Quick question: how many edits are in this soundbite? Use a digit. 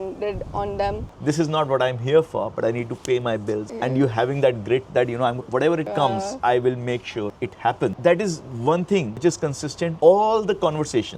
1